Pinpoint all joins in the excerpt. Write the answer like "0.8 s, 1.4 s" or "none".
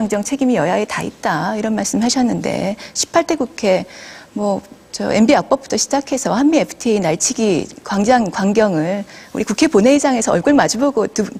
none